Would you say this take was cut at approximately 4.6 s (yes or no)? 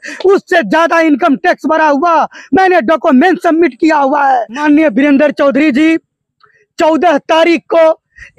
yes